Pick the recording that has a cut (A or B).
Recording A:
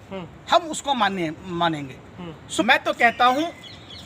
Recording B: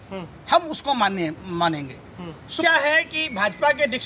A